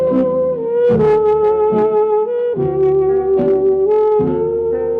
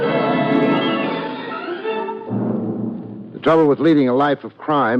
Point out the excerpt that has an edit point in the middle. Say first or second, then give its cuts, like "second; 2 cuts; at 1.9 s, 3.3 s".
first; 1 cut; at 3.4 s